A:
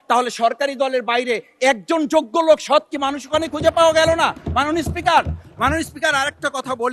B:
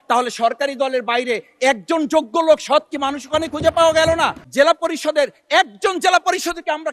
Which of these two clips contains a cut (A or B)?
B